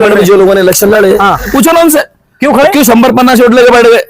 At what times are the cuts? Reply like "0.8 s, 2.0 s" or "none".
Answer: 1.5 s